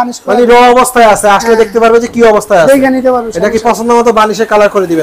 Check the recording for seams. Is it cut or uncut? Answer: uncut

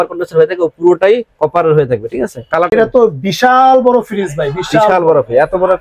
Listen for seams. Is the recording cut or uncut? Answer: cut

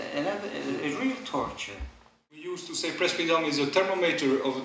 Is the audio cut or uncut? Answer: cut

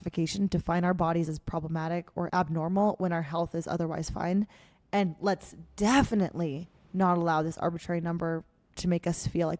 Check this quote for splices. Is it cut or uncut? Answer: uncut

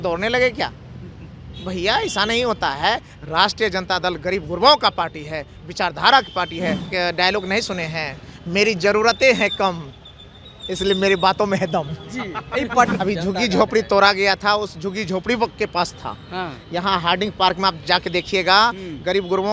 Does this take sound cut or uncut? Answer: cut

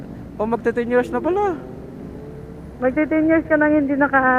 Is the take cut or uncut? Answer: uncut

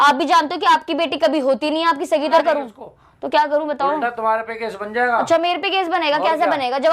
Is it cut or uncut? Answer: cut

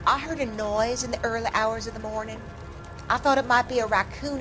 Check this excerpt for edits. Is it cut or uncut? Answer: uncut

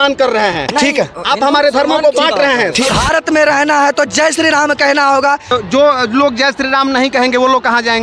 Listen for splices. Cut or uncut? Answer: cut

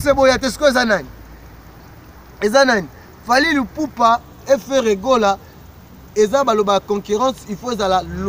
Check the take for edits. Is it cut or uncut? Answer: uncut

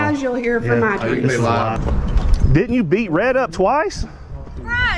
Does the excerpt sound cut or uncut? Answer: cut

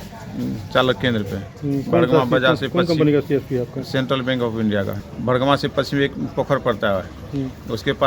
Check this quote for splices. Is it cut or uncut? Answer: cut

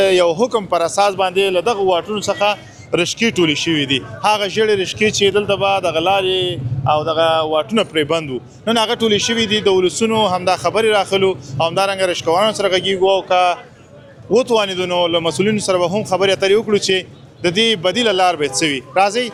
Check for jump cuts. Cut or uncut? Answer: uncut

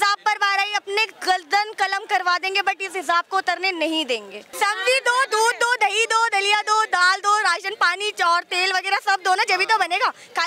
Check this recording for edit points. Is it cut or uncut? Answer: cut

